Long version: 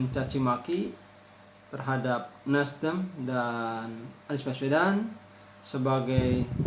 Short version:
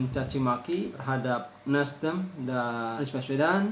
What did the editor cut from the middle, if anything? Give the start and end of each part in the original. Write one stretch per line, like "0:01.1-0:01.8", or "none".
0:01.0-0:01.8
0:03.7-0:04.3